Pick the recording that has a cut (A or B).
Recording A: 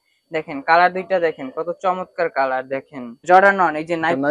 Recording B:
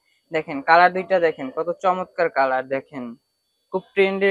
A